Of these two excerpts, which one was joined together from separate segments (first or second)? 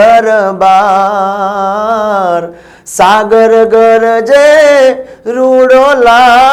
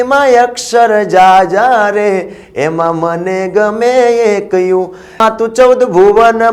second